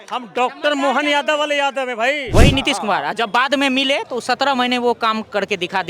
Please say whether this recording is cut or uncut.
cut